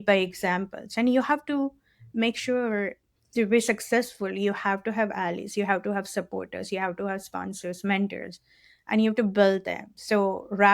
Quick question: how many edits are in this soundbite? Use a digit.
1